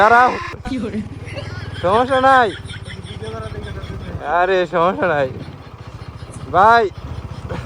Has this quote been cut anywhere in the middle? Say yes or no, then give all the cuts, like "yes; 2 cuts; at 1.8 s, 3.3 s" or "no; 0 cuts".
no; 0 cuts